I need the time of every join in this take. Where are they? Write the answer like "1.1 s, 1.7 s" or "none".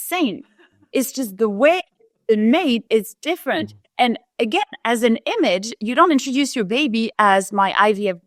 none